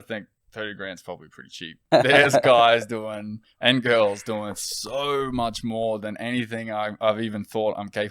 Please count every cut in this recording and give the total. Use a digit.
1